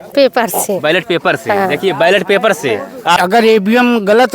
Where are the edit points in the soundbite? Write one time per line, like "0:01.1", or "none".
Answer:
0:03.2